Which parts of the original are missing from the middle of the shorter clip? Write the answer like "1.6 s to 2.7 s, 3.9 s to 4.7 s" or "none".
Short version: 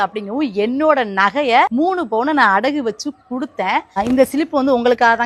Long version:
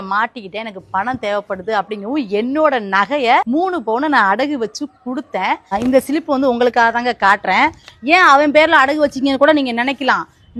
none

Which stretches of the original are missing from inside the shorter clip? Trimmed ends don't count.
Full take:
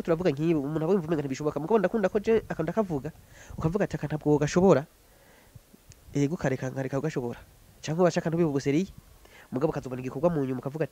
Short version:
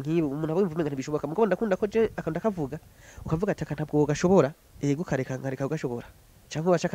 5.0 s to 6.0 s

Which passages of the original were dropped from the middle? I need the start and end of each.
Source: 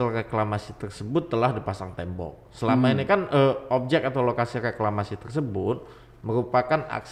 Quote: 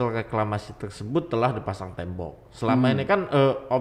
none

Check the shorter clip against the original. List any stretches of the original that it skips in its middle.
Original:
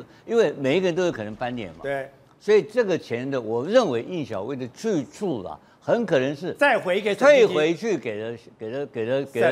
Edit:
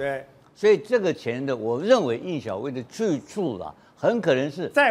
none

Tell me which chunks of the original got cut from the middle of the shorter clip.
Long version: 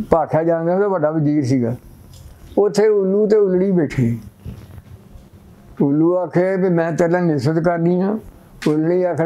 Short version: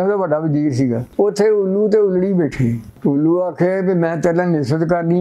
1.8 s to 2.4 s, 4.3 s to 5.6 s

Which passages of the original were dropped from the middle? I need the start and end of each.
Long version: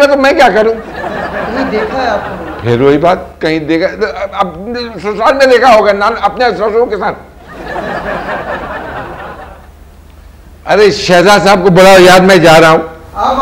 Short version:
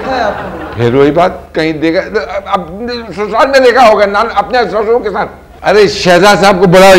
7.3 s to 10.5 s

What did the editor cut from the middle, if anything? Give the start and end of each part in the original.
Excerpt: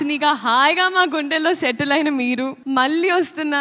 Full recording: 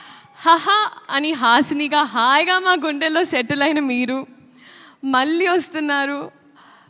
4.3 s to 4.9 s

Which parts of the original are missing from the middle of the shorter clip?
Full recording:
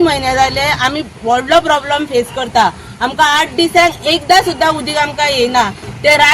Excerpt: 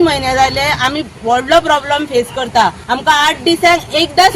2.8 s to 2.9 s

